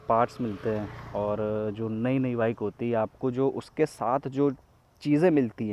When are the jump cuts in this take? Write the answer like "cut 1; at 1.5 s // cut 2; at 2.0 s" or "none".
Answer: none